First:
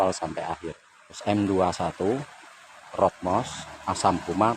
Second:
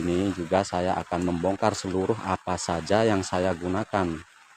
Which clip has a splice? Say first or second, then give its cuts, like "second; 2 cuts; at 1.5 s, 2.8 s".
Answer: first; 1 cut; at 1.2 s